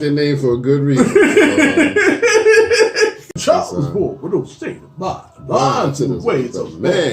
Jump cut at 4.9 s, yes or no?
no